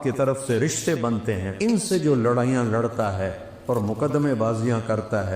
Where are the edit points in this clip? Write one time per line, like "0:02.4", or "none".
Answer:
0:01.5